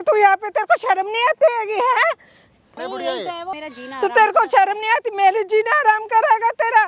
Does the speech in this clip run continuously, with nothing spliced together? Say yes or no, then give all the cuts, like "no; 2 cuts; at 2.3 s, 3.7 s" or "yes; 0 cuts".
no; 2 cuts; at 2.8 s, 3.5 s